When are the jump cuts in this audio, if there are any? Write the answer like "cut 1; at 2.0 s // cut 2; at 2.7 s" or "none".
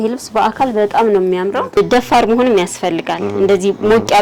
cut 1; at 1.8 s